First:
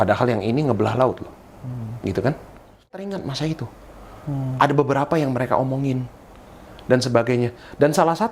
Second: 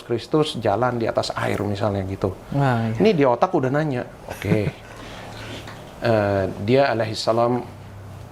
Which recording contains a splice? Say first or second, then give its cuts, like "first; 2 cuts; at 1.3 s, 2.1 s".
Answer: first; 1 cut; at 3.0 s